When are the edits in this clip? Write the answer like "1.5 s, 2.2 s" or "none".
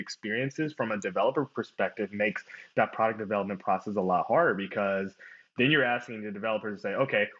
none